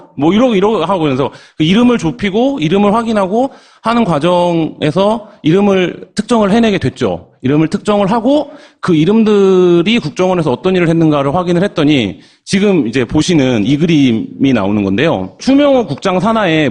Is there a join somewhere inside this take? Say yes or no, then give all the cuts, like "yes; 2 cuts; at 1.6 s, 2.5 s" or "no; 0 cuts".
no; 0 cuts